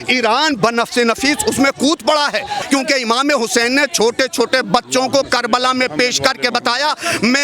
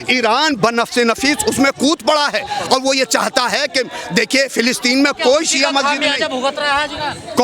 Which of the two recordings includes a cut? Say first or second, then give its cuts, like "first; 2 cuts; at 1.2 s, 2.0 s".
first; 1 cut; at 2.6 s